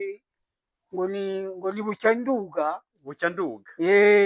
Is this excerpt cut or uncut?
uncut